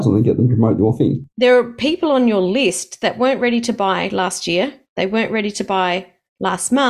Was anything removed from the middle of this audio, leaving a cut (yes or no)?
yes